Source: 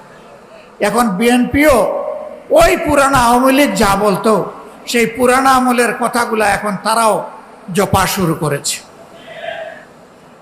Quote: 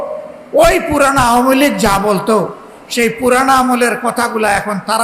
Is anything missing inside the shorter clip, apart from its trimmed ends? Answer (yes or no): no